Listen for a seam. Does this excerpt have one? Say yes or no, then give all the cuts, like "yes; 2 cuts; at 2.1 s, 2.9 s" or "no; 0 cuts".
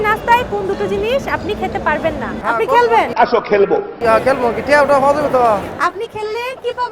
yes; 2 cuts; at 2.4 s, 4.0 s